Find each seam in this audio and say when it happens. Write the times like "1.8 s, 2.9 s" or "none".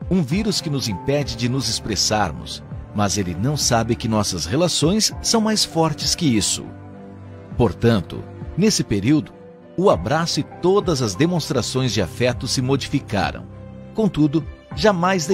8.0 s